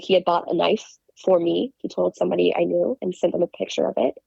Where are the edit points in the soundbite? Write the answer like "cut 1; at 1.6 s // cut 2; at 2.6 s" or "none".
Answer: cut 1; at 3.1 s